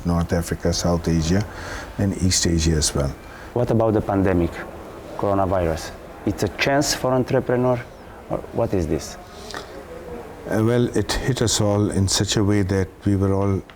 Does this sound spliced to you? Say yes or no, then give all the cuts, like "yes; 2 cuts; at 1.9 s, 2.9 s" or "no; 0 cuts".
yes; 1 cut; at 3.3 s